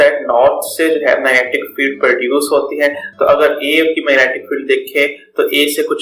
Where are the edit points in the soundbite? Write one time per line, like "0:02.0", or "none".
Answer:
none